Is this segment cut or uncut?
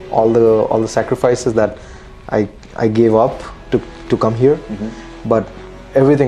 uncut